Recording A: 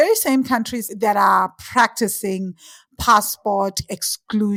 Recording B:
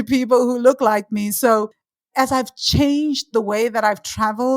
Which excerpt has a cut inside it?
B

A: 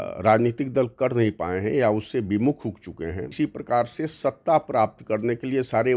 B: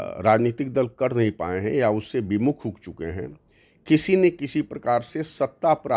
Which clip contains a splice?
A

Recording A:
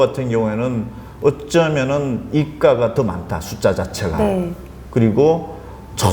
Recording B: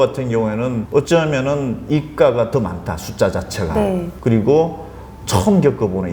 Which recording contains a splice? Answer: B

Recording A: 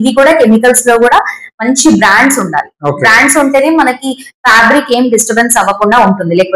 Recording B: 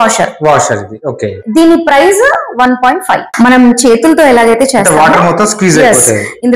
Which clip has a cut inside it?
B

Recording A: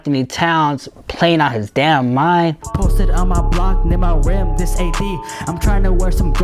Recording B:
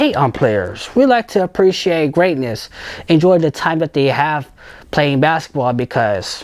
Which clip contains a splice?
A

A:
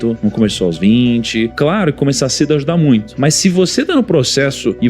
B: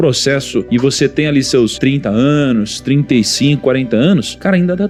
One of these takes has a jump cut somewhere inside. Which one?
A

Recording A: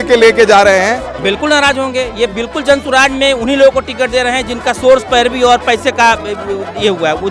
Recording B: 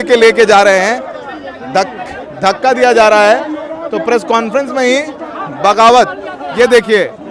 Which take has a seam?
A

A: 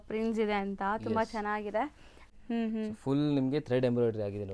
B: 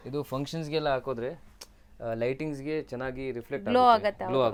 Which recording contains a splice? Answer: A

